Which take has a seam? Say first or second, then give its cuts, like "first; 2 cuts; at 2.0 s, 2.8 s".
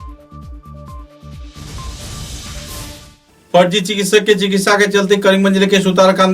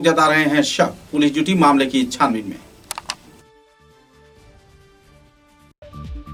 first; 1 cut; at 3.2 s